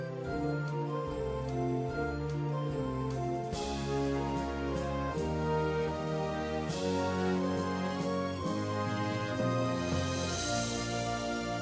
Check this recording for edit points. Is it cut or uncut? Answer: uncut